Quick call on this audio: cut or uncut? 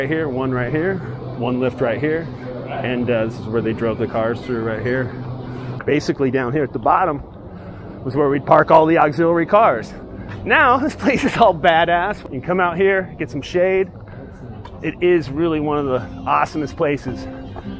cut